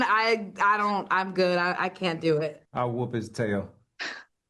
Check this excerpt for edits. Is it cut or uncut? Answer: cut